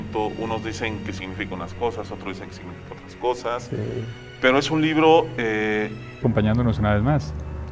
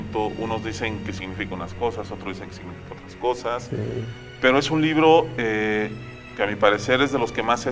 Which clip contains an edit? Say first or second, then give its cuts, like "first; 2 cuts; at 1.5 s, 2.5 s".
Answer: second; 1 cut; at 6.2 s